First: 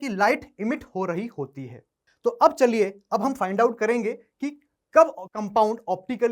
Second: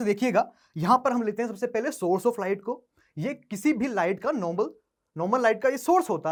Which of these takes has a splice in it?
first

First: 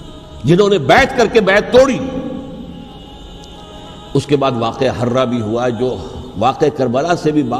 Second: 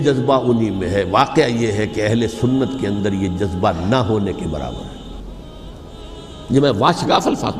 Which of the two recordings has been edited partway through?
first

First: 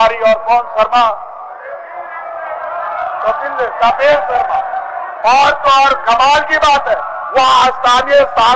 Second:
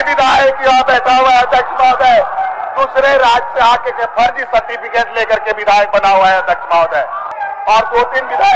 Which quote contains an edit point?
second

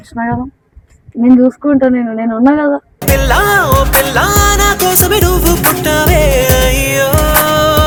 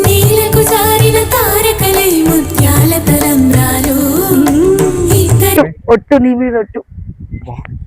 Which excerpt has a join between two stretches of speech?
second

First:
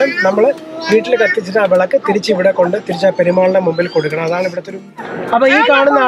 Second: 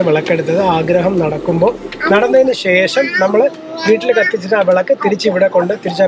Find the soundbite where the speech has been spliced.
first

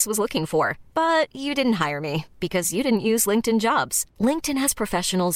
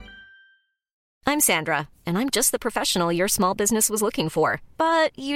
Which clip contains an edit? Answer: second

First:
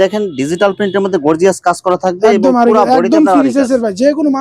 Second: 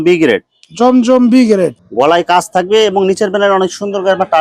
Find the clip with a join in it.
second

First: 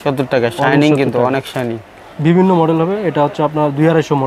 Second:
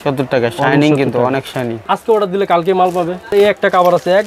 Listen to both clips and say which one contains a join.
second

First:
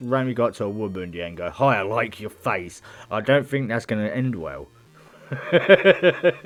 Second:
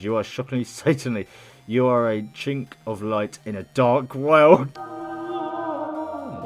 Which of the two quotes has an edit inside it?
second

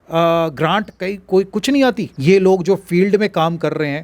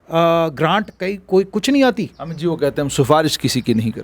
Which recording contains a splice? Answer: first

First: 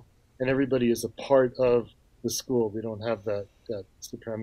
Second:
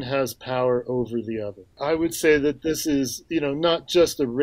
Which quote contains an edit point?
second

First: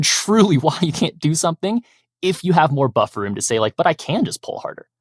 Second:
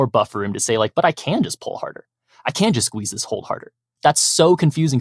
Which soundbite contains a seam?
second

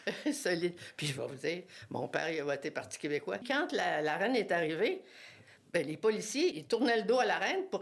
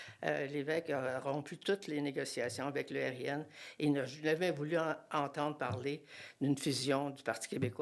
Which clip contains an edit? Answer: first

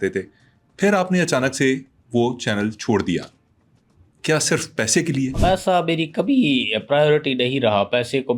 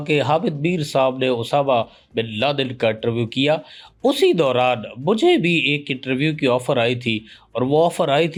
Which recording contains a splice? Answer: first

